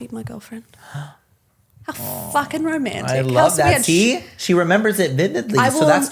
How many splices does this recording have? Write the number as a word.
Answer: zero